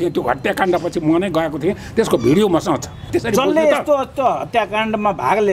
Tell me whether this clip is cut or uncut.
cut